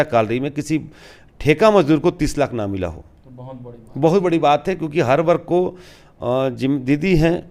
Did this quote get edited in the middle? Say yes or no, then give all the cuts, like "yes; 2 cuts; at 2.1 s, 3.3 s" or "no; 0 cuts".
no; 0 cuts